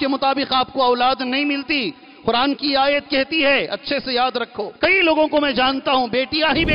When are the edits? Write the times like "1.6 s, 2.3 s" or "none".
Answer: 4.7 s